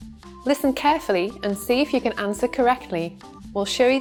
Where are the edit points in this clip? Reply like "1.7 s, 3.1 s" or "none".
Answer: none